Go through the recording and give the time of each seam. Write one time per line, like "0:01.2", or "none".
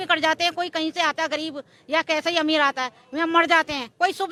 none